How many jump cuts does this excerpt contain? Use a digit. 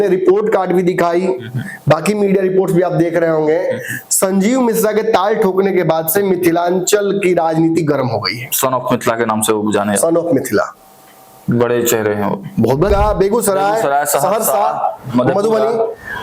1